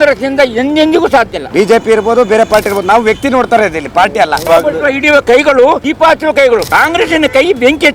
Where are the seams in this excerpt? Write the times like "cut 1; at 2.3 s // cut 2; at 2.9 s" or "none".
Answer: cut 1; at 1.4 s // cut 2; at 4.5 s // cut 3; at 5.9 s // cut 4; at 6.7 s